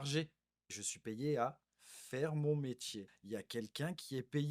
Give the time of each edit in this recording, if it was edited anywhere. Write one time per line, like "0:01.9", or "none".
0:00.9
0:03.1